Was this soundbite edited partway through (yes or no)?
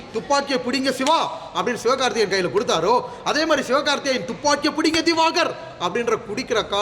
no